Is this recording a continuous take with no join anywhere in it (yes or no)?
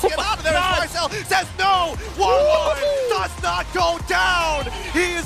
yes